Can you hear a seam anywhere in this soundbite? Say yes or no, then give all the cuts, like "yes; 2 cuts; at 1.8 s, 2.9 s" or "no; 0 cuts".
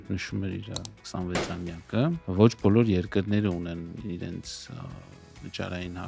yes; 1 cut; at 2.2 s